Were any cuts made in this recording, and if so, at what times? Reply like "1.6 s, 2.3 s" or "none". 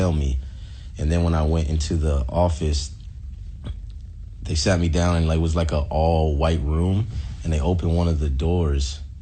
none